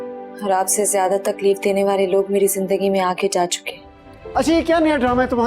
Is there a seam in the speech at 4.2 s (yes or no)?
yes